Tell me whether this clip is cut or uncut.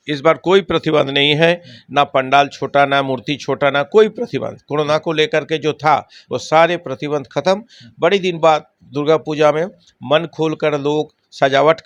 uncut